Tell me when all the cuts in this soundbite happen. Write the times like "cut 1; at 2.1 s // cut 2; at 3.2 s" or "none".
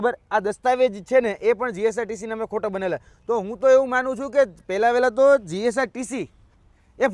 none